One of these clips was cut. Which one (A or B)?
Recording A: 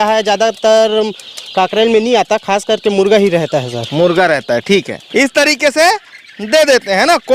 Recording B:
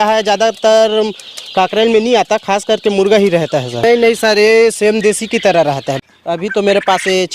B